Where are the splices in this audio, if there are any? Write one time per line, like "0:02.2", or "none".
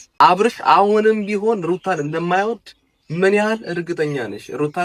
none